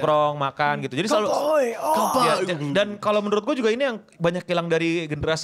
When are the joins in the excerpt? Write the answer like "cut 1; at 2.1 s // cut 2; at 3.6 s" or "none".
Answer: none